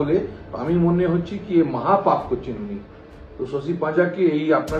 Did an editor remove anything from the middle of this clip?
no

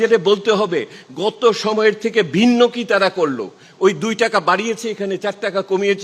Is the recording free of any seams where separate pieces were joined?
yes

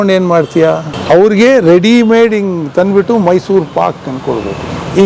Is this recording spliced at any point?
yes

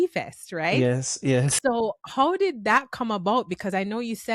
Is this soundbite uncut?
yes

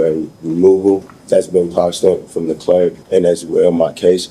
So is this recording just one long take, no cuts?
no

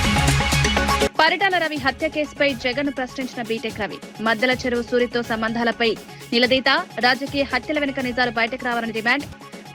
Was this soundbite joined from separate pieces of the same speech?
yes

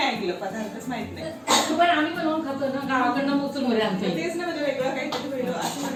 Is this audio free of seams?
yes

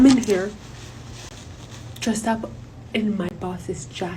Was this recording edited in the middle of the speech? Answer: no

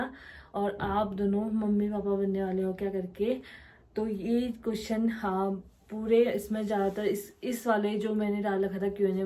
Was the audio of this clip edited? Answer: no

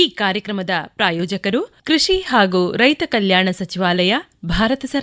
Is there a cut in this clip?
yes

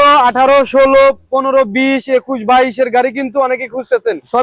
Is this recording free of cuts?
yes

